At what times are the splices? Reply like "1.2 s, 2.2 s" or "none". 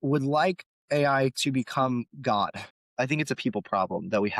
2.7 s